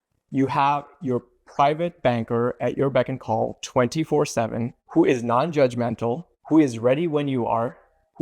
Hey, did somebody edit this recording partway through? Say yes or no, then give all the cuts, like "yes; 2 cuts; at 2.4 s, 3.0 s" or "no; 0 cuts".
yes; 1 cut; at 6.3 s